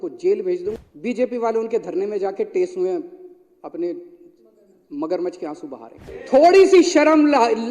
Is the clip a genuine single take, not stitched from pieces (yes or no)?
no